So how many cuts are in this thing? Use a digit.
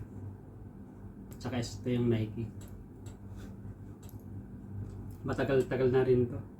1